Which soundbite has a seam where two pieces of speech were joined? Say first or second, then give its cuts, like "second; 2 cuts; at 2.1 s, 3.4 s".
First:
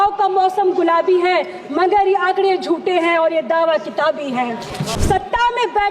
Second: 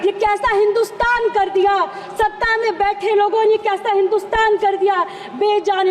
first; 1 cut; at 4.9 s